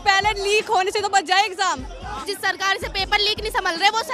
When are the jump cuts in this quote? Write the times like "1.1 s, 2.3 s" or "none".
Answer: 2.3 s